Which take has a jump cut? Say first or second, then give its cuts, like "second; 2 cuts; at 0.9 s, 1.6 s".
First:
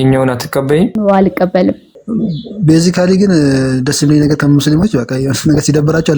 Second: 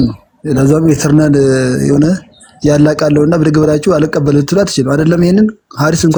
first; 2 cuts; at 0.9 s, 1.9 s